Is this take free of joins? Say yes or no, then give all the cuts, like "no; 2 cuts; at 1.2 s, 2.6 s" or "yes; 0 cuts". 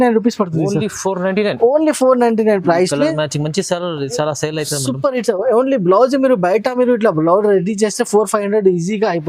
yes; 0 cuts